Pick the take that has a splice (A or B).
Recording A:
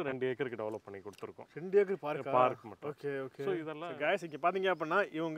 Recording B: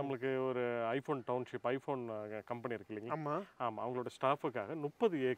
A